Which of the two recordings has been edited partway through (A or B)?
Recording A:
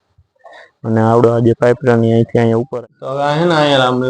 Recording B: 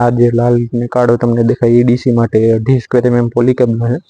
A